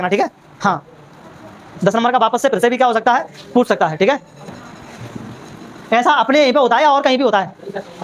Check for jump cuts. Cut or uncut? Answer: cut